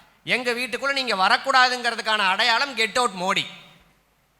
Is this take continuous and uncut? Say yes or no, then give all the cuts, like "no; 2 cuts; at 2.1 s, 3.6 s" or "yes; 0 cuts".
yes; 0 cuts